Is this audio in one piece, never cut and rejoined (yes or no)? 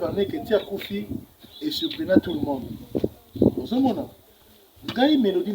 yes